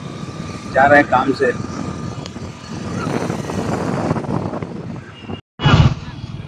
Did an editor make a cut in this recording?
no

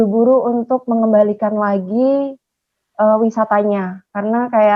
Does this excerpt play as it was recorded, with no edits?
yes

